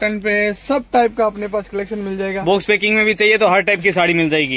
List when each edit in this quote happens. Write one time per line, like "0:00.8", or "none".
none